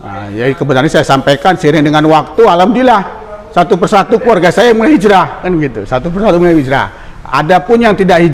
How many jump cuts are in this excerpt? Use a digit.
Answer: 0